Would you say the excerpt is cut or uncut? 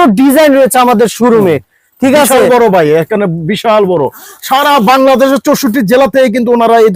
uncut